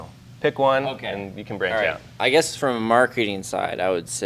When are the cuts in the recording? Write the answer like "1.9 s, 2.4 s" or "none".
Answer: none